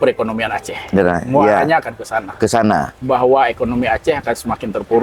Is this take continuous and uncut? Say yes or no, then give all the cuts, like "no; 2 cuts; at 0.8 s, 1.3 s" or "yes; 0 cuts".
yes; 0 cuts